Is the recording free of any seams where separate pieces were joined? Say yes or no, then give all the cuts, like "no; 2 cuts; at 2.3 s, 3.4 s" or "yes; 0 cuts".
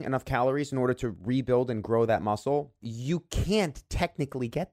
no; 1 cut; at 2.8 s